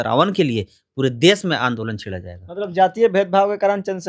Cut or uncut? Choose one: uncut